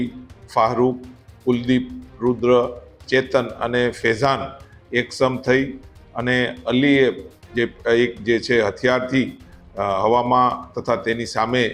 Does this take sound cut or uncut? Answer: uncut